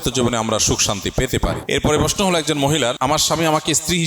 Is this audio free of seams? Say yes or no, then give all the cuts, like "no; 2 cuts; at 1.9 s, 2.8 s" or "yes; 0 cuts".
no; 2 cuts; at 1.6 s, 3.0 s